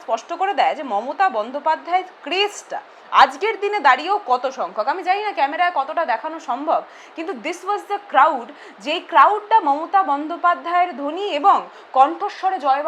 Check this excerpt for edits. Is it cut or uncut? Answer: uncut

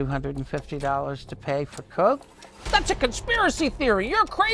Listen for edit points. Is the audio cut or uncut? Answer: cut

